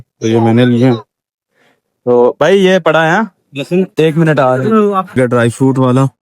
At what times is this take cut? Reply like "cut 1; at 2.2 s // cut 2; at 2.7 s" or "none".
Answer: cut 1; at 5.1 s